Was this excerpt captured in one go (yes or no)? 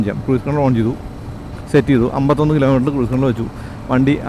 yes